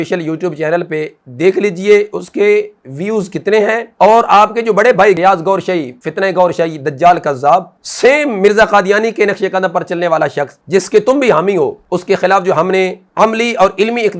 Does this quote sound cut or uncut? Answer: uncut